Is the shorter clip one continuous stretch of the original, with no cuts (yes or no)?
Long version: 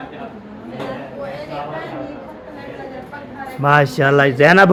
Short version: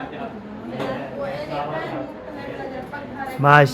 no